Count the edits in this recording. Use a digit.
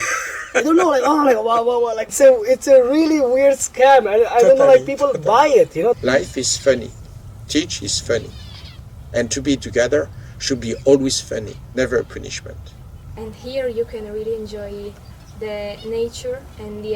3